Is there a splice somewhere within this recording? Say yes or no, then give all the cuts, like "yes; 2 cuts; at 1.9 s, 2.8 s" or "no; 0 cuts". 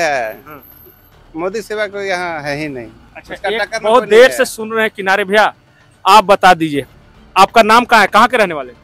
no; 0 cuts